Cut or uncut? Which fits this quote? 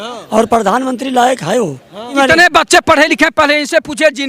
cut